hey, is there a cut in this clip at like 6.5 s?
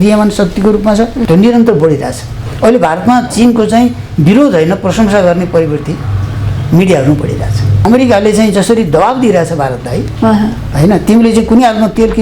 no; 2 cuts; at 1.2 s, 7.9 s

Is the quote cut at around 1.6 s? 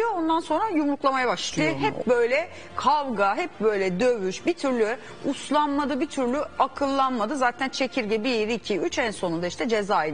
yes; 1 cut; at 1.6 s

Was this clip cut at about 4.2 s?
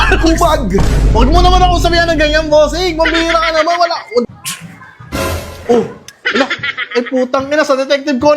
yes; 1 cut; at 4.2 s

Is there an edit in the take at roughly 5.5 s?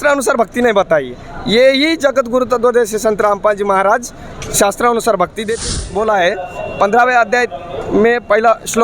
yes; 1 cut; at 5.5 s

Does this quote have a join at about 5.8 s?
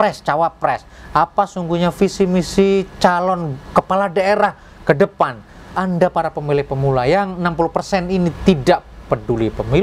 yes; 1 cut; at 5.8 s

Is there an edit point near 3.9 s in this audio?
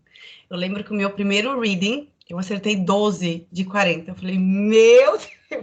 no; 0 cuts

